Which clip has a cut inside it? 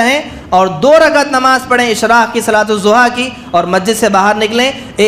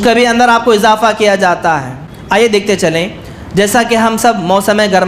second; 1 cut; at 2.0 s

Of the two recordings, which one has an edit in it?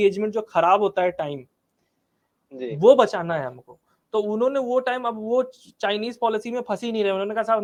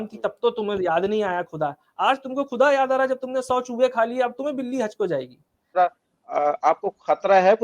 second; 1 cut; at 5.6 s

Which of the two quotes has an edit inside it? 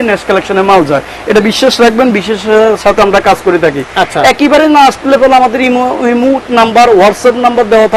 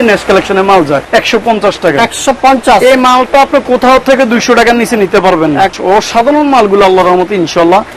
second; 2 cuts; at 1.0 s, 5.8 s

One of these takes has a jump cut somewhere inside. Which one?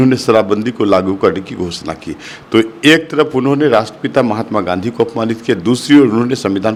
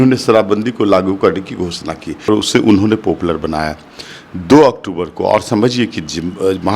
second; 1 cut; at 2.3 s

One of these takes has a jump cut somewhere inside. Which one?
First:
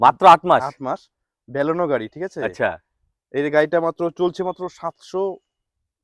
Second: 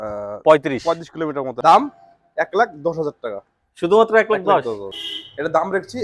second; 2 cuts; at 1.6 s, 5.0 s

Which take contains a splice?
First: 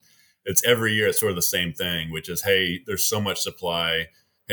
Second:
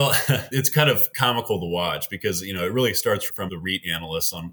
second; 2 cuts; at 1.1 s, 3.4 s

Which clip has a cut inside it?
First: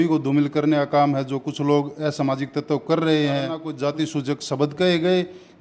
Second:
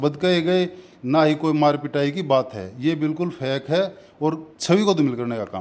first; 1 cut; at 3.7 s

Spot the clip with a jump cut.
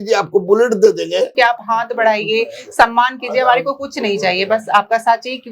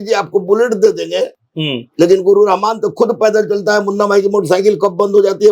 first; 1 cut; at 1.3 s

